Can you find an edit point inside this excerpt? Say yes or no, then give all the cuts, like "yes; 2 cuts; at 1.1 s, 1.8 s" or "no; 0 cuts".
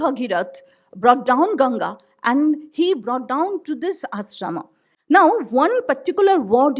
no; 0 cuts